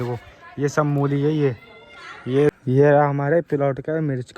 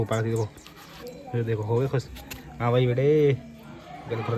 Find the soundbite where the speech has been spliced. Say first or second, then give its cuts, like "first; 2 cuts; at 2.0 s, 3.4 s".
first; 1 cut; at 2.5 s